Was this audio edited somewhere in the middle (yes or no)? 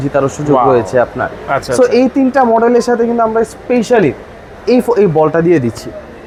no